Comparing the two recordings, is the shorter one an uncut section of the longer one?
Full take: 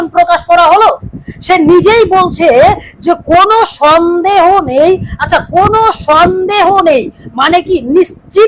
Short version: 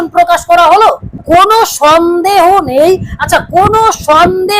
no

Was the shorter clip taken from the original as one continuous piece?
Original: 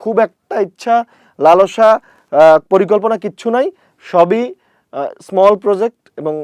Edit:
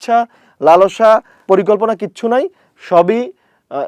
no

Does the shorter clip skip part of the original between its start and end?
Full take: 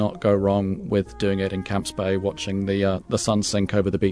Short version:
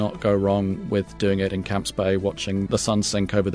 yes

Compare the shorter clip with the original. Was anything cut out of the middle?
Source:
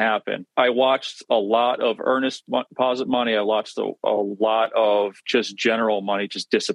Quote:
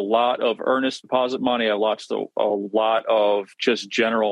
yes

